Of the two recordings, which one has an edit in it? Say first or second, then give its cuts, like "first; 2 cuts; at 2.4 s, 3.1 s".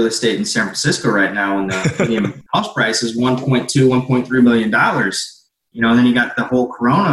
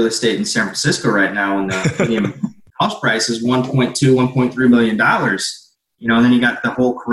first; 1 cut; at 2.4 s